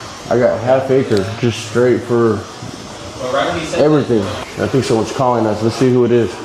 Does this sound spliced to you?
yes; 1 cut; at 4.4 s

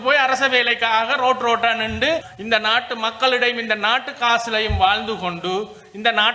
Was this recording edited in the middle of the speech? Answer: yes; 1 cut; at 2.3 s

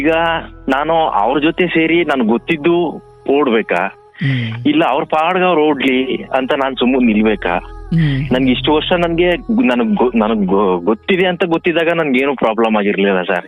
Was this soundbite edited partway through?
no; 0 cuts

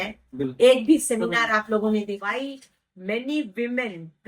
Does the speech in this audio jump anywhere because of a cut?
yes; 1 cut; at 2.2 s

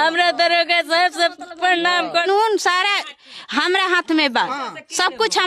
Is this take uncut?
no; 1 cut; at 2.2 s

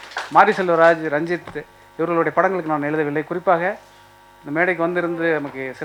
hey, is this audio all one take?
yes; 0 cuts

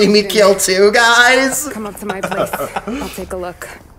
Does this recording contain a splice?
yes; 1 cut; at 3.1 s

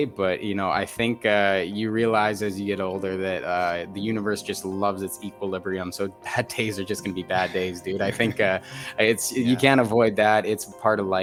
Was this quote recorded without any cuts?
yes; 0 cuts

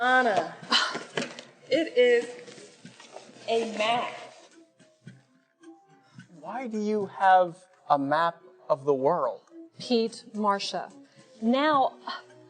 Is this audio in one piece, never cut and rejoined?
yes; 0 cuts

